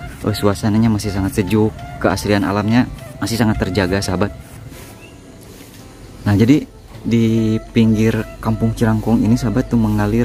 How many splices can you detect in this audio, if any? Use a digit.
1